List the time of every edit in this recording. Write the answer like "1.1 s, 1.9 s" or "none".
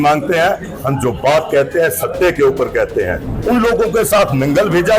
3.3 s